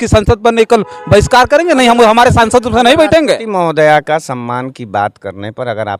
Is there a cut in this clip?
no; 0 cuts

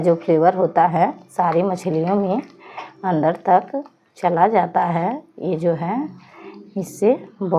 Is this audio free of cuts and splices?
yes; 0 cuts

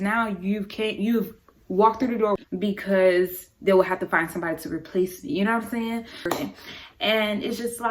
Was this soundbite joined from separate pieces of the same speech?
yes; 2 cuts; at 2.4 s, 6.3 s

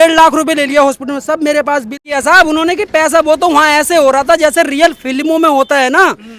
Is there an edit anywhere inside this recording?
yes; 1 cut; at 2.0 s

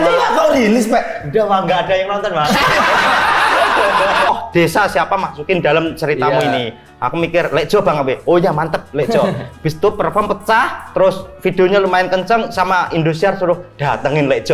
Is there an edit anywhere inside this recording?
yes; 1 cut; at 4.3 s

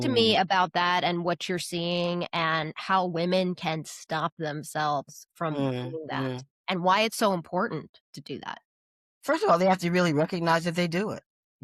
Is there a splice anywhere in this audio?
no; 0 cuts

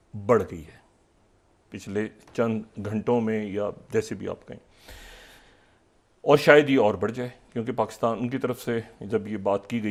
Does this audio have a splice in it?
no; 0 cuts

